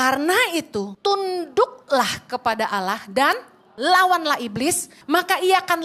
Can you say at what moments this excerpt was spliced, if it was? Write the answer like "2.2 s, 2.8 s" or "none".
0.9 s, 4.9 s

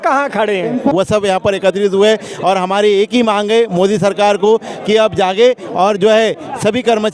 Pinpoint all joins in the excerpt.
0.9 s

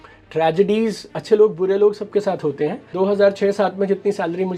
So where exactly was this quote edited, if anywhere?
2.8 s

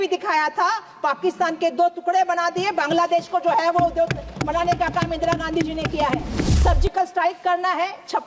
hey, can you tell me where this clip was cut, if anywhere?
6.5 s

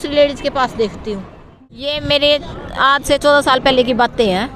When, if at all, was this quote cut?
2.0 s

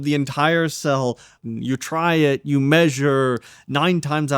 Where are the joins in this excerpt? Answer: 1.5 s

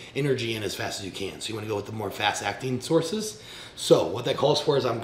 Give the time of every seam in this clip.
none

